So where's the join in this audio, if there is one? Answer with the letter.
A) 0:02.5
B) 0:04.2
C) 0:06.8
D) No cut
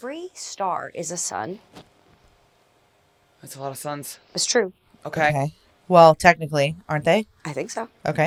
D